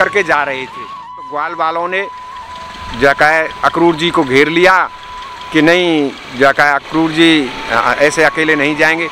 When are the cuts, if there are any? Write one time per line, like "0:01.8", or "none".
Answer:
0:01.2